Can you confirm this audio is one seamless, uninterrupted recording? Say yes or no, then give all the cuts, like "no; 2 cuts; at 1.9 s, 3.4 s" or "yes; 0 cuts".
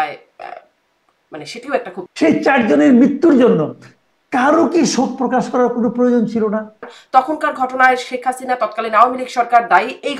no; 2 cuts; at 2.1 s, 7.0 s